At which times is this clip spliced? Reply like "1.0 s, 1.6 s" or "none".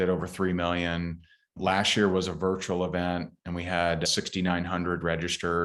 none